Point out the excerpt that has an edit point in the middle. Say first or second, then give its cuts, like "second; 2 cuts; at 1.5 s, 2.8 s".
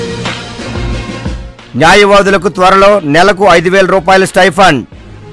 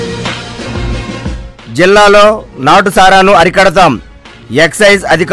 second; 1 cut; at 1.4 s